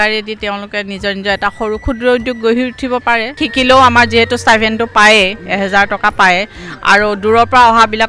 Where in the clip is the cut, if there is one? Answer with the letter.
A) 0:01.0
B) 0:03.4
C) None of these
B